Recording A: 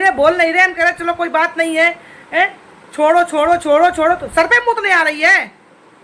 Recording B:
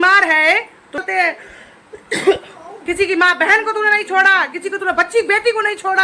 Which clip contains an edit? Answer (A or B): B